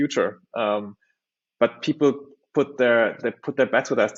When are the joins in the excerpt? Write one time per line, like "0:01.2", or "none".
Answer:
none